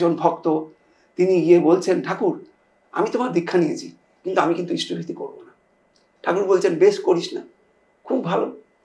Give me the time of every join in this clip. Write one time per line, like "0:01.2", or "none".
none